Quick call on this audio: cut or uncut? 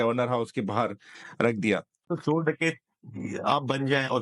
cut